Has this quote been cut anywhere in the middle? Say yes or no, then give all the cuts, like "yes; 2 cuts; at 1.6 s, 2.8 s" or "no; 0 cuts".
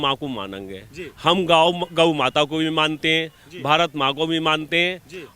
no; 0 cuts